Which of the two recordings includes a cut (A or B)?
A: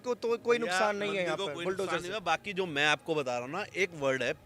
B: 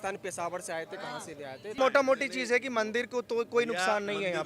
B